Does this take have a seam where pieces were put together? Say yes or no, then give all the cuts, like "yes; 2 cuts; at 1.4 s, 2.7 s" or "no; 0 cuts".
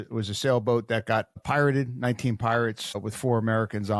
yes; 2 cuts; at 1.4 s, 3.0 s